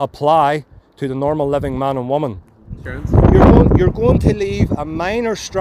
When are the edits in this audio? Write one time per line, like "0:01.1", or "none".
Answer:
0:02.9